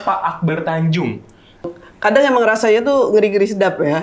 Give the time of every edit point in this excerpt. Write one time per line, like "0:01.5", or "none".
0:01.7